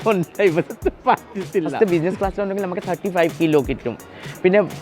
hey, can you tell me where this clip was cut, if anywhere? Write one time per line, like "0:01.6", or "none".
0:01.7